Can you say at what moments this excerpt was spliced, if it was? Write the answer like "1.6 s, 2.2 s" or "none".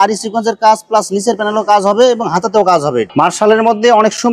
3.1 s